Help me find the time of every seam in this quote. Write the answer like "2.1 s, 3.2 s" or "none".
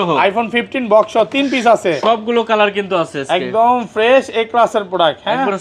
none